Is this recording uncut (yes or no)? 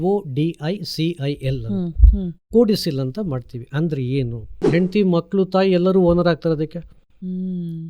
no